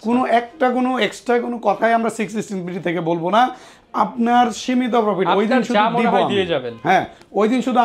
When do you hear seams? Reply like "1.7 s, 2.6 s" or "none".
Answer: none